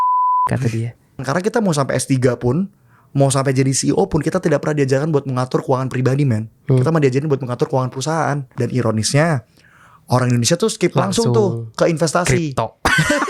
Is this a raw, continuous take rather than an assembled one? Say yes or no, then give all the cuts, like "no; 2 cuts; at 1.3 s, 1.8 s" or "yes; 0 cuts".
no; 2 cuts; at 1.2 s, 8.5 s